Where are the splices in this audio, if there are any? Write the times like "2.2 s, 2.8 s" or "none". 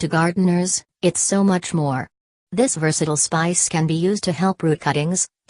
4.0 s